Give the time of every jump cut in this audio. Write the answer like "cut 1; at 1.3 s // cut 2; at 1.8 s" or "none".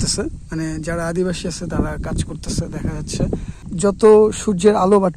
cut 1; at 3.6 s